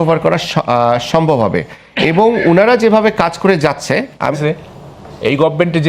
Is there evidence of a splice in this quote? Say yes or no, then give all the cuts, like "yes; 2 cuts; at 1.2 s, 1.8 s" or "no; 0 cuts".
yes; 1 cut; at 4.3 s